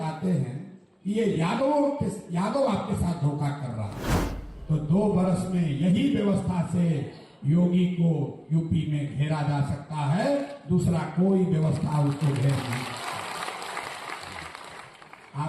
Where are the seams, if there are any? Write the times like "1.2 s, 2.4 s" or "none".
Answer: 4.4 s